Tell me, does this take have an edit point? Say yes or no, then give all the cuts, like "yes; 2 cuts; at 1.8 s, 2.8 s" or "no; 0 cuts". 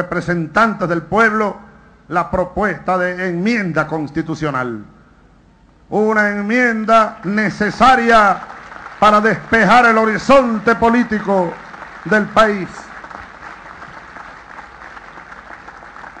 no; 0 cuts